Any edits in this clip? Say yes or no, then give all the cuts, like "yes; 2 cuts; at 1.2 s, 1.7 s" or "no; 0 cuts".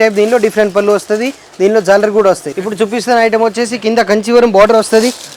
yes; 1 cut; at 2.5 s